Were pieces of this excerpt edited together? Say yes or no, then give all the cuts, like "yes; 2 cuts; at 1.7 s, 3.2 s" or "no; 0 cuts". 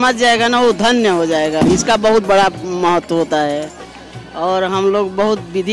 no; 0 cuts